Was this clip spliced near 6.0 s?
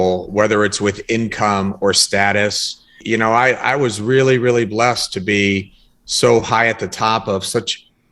no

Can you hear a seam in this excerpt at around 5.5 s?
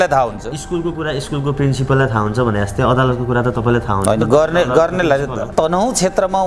yes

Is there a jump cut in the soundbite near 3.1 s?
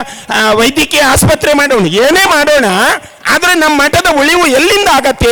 no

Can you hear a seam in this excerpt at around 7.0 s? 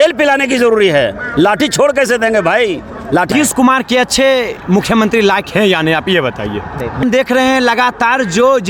yes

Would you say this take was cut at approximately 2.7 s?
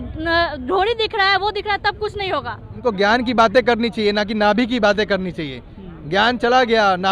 yes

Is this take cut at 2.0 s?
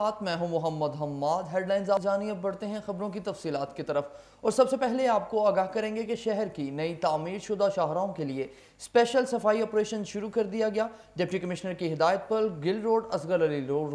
yes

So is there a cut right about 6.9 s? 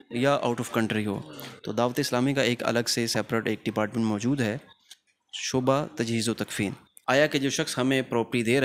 yes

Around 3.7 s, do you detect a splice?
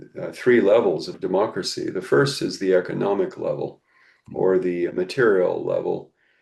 no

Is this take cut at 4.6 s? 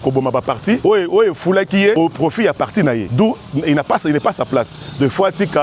no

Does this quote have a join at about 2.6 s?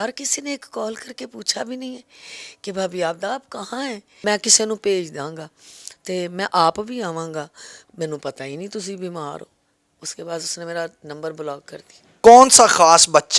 no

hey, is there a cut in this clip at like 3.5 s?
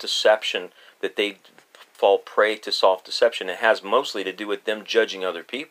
no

